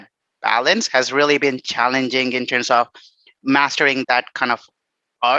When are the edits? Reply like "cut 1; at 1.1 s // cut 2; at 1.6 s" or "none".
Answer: cut 1; at 4.0 s